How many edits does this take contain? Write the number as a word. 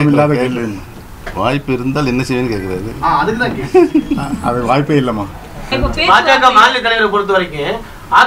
one